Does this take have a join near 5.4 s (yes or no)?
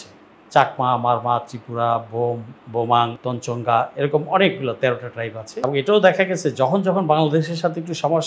yes